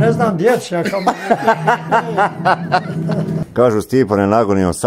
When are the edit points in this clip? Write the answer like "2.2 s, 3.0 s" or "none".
3.4 s